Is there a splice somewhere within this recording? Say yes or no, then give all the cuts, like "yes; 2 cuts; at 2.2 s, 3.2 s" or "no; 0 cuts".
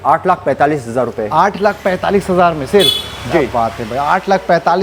no; 0 cuts